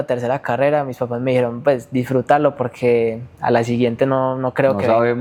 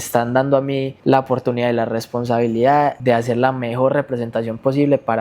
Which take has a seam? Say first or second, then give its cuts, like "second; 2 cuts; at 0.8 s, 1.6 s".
second; 2 cuts; at 0.9 s, 3.0 s